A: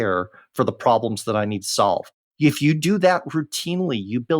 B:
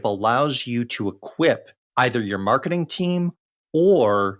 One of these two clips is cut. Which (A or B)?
A